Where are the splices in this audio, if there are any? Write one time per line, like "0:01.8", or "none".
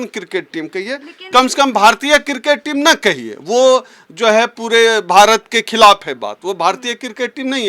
none